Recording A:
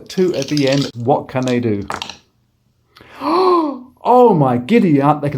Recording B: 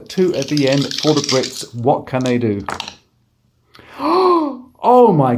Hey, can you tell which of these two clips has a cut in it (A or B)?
A